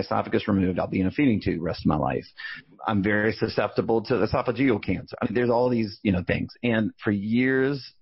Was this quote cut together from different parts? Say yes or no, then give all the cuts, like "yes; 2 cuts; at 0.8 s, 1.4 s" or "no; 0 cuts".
no; 0 cuts